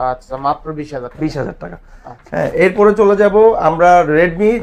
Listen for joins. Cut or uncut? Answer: uncut